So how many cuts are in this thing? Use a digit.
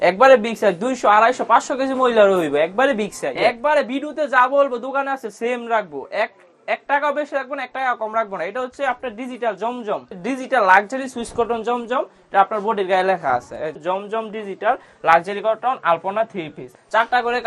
4